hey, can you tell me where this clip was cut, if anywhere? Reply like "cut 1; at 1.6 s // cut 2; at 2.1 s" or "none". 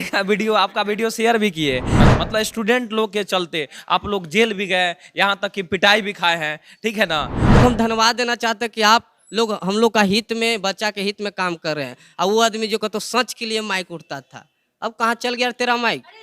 cut 1; at 2.1 s // cut 2; at 7.6 s